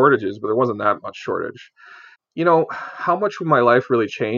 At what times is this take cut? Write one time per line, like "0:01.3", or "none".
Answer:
0:02.2